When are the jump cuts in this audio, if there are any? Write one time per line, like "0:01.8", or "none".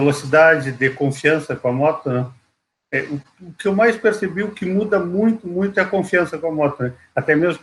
none